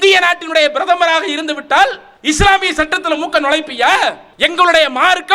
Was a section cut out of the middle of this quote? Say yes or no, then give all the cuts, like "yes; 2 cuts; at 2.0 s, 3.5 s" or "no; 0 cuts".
yes; 2 cuts; at 2.1 s, 4.3 s